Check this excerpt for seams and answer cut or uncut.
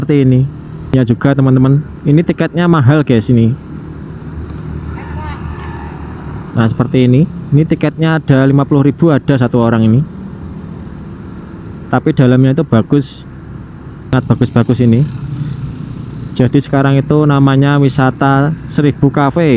cut